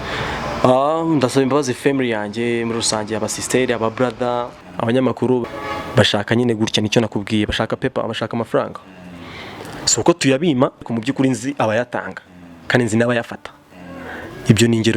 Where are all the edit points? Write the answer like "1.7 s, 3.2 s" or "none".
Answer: 4.6 s, 5.5 s, 10.9 s